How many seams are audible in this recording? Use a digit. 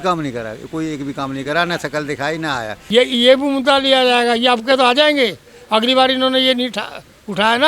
1